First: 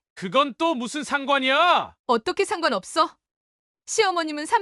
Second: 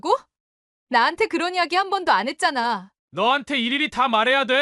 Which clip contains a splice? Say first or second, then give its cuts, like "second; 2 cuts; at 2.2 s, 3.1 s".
second; 1 cut; at 2.9 s